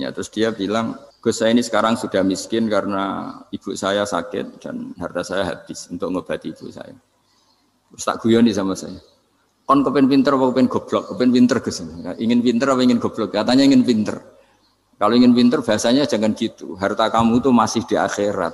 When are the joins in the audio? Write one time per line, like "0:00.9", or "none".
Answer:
0:01.1